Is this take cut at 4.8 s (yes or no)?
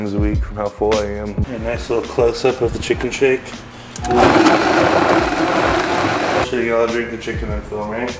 no